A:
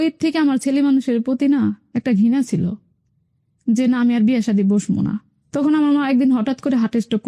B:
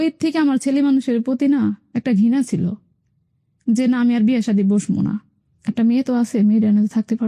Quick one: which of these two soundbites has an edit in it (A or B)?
A